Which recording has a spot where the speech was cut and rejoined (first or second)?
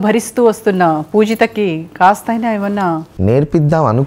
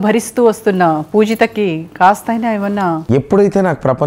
second